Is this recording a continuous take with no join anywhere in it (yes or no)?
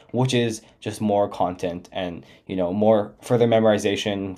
yes